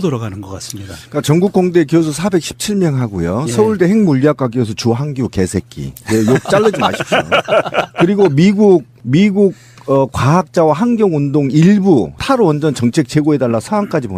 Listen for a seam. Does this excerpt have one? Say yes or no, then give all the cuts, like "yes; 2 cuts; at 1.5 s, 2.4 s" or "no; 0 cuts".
no; 0 cuts